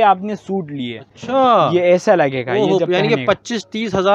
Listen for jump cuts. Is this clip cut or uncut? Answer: uncut